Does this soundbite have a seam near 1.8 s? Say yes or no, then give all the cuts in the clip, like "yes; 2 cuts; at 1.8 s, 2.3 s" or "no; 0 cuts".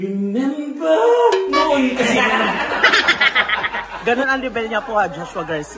no; 1 cut; at 3.9 s